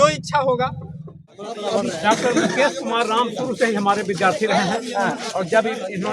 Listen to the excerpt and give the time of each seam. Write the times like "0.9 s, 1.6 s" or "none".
1.4 s